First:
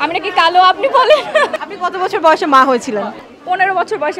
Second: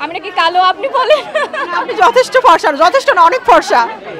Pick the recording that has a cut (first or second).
first